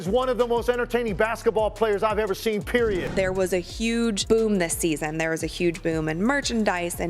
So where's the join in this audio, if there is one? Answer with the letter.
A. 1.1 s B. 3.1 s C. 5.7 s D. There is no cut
B